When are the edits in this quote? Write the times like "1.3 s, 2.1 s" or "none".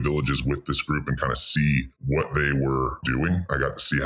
1.9 s, 3.0 s